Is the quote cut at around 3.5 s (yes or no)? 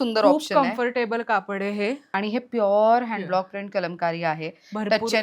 no